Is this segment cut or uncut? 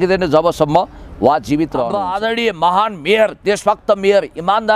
cut